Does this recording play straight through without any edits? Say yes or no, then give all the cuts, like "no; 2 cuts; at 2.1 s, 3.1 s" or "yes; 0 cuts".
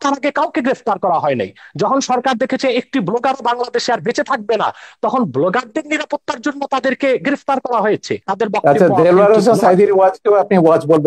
no; 1 cut; at 8.2 s